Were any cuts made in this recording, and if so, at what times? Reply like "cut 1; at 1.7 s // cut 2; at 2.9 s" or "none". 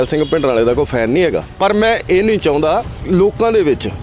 cut 1; at 1.5 s // cut 2; at 2.9 s